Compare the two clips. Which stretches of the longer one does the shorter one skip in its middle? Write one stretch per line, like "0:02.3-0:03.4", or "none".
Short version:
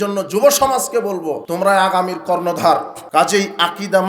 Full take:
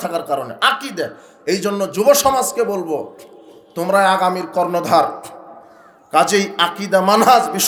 0:03.1-0:03.7
0:05.2-0:06.0

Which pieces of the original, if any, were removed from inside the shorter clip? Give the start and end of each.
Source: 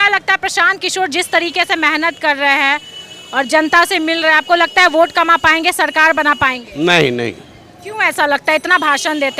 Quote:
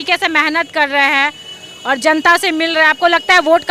none

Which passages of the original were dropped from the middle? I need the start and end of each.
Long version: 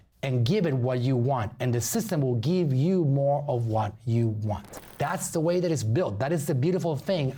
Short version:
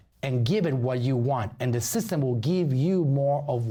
none

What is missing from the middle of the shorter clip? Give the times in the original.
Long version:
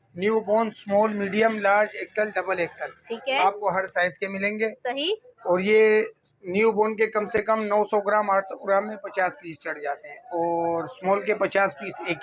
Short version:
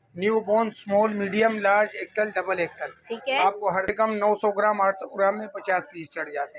0:03.9-0:07.4

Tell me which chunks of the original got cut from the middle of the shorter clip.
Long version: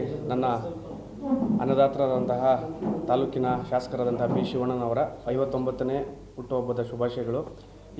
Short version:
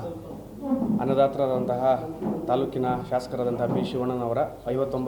none

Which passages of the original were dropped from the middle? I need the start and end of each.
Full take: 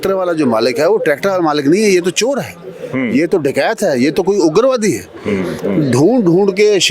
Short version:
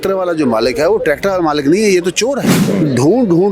0:02.6-0:05.6

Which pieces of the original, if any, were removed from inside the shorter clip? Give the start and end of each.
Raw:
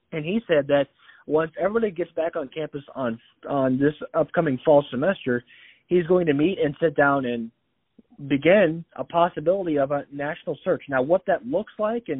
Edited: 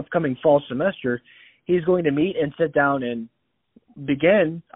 none

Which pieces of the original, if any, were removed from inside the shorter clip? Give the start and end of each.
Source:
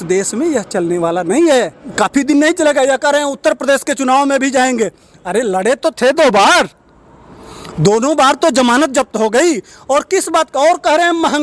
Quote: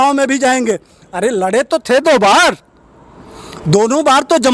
none

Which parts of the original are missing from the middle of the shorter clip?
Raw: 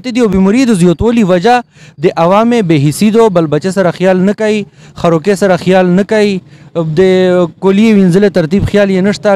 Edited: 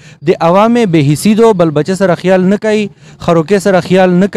none

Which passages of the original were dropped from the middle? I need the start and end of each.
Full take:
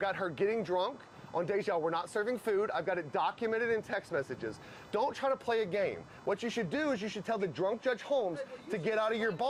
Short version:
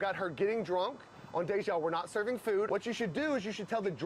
0:02.7-0:06.2

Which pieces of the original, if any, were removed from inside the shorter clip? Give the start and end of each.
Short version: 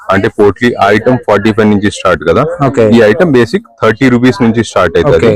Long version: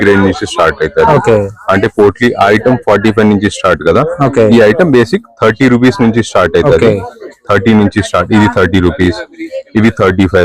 none

